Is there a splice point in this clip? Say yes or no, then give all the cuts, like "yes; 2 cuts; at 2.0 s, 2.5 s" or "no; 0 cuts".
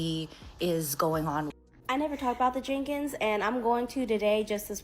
yes; 1 cut; at 1.5 s